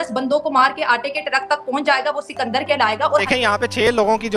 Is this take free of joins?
no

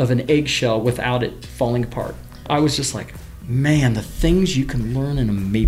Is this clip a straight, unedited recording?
no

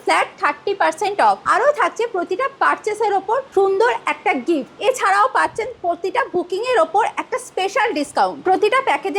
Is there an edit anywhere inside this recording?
yes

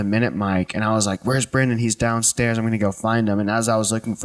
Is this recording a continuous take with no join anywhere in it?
yes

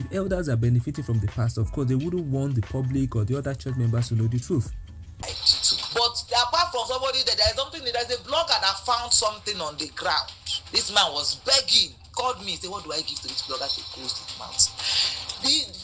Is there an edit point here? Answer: yes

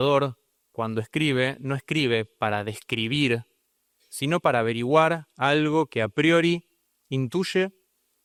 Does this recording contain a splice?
no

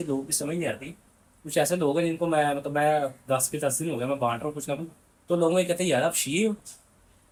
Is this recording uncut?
yes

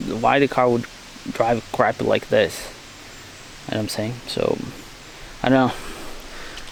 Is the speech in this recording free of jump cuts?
yes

